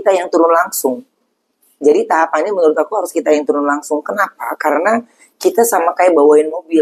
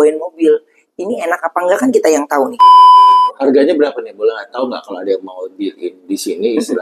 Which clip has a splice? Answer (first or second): second